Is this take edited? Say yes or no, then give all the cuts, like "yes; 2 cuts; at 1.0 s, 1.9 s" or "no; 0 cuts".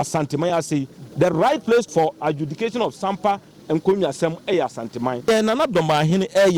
yes; 2 cuts; at 1.9 s, 5.3 s